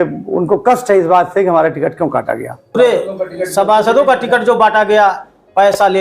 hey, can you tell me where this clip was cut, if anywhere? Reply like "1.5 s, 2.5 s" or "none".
2.7 s